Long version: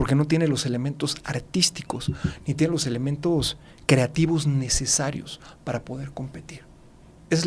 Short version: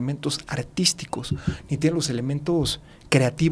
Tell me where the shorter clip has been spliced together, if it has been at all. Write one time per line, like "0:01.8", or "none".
none